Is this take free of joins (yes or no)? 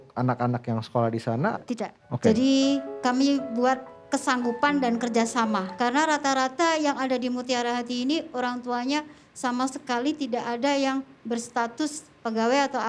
no